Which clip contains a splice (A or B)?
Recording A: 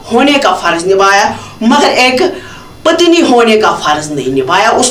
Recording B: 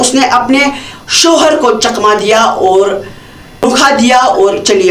B